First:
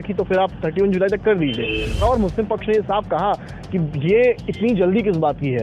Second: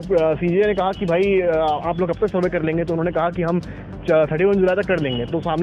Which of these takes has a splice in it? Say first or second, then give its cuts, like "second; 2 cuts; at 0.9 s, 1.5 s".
first; 1 cut; at 2.0 s